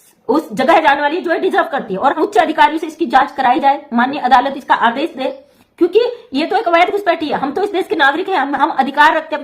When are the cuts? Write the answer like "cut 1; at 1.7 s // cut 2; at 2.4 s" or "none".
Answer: cut 1; at 2.1 s

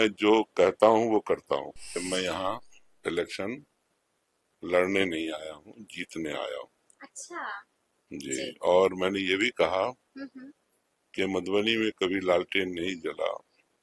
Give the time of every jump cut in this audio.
cut 1; at 2.0 s

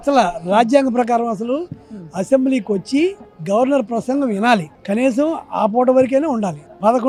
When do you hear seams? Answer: none

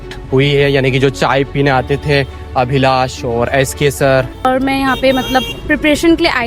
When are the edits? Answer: cut 1; at 4.5 s

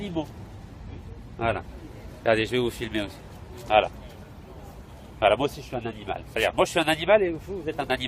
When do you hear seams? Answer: cut 1; at 2.2 s

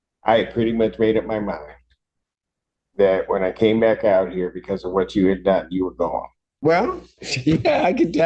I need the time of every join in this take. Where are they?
cut 1; at 6.5 s

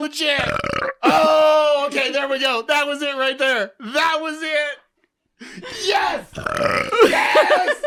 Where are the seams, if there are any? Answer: none

